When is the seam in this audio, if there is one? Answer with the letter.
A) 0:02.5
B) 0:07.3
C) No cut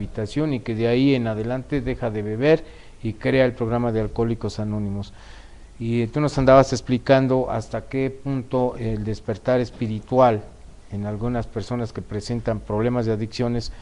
A